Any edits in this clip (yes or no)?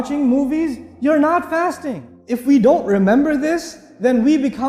yes